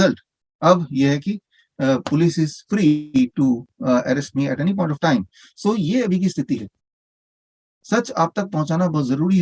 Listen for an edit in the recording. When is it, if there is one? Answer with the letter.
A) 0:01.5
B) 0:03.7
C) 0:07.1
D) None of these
C